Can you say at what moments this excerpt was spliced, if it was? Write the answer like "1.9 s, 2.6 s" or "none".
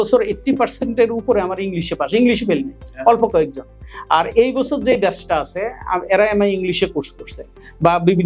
none